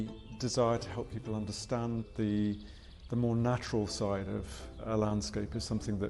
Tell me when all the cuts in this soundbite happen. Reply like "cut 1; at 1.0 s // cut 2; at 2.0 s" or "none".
cut 1; at 2.0 s // cut 2; at 4.8 s